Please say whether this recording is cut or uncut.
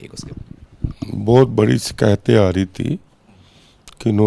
uncut